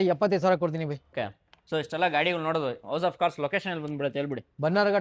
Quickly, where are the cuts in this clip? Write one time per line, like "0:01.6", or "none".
0:01.1